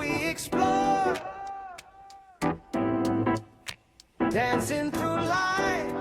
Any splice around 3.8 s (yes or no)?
no